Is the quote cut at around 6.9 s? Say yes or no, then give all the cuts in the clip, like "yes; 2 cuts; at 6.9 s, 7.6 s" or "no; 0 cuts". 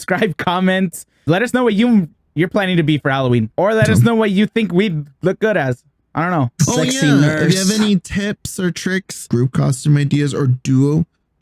no; 3 cuts; at 1.3 s, 3.5 s, 9.3 s